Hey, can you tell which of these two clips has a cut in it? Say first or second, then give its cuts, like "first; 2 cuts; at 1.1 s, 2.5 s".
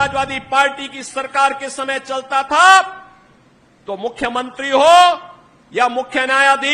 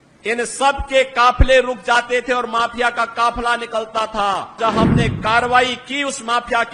second; 1 cut; at 4.6 s